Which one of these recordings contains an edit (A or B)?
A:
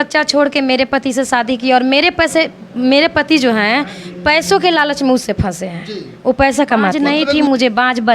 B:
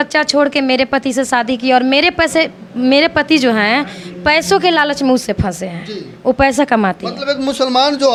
A